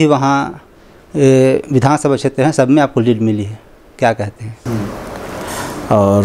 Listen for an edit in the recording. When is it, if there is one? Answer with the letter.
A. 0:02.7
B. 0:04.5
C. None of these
B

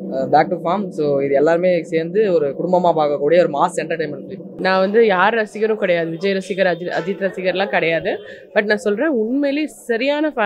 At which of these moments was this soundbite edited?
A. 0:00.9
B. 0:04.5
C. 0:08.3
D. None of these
B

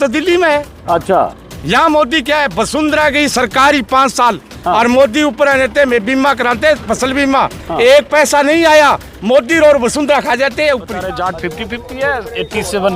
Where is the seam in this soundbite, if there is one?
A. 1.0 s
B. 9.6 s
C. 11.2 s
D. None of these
C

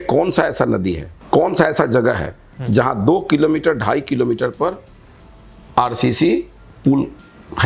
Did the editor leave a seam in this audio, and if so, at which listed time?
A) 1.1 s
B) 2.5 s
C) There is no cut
A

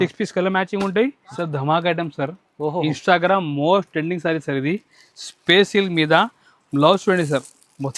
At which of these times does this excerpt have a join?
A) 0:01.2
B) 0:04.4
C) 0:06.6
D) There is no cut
A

